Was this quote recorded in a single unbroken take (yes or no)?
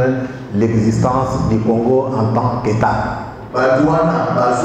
yes